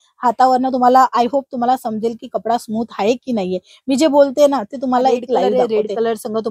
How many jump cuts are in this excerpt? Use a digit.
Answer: 1